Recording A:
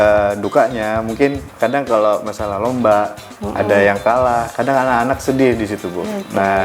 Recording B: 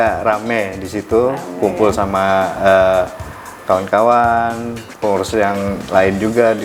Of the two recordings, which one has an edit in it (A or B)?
A